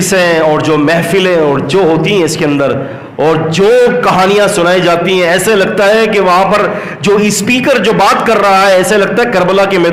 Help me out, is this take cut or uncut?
uncut